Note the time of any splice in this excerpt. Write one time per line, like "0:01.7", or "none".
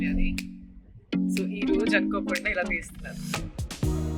none